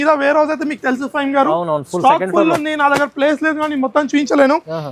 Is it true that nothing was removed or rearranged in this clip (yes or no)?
yes